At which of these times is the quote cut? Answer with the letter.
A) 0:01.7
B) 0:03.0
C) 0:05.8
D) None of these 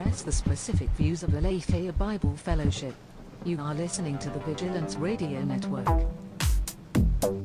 C